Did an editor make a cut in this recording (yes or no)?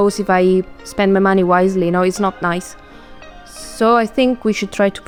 no